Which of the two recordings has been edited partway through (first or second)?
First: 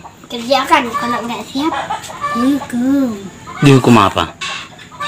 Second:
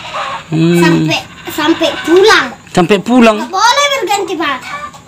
first